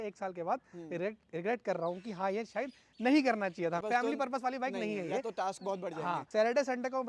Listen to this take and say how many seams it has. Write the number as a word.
two